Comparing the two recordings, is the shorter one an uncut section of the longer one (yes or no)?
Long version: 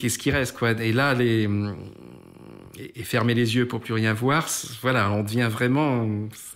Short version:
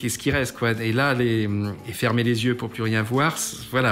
no